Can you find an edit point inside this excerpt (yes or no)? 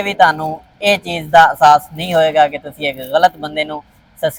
no